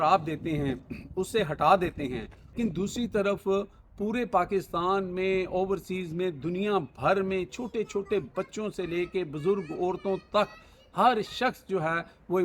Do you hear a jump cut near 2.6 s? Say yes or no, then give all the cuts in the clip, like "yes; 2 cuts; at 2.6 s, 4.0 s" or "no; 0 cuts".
yes; 1 cut; at 2.6 s